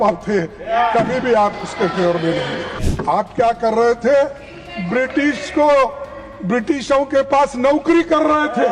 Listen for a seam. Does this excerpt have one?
yes; 1 cut; at 2.8 s

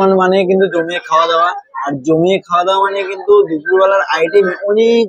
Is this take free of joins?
yes; 0 cuts

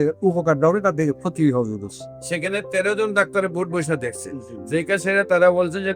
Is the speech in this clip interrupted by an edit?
no; 0 cuts

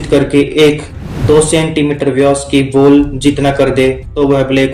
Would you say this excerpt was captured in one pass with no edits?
yes; 0 cuts

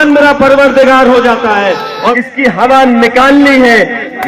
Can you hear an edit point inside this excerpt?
yes; 1 cut; at 2.1 s

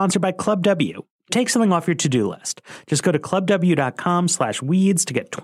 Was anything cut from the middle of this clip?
yes; 1 cut; at 1.3 s

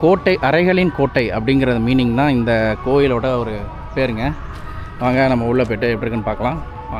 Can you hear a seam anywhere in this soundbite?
no; 0 cuts

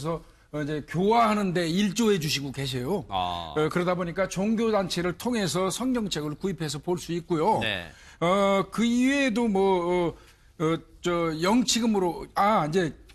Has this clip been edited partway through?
yes; 1 cut; at 6.3 s

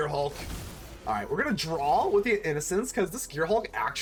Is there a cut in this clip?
no; 0 cuts

